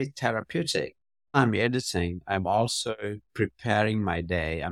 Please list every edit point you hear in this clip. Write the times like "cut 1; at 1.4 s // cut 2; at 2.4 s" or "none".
cut 1; at 1.4 s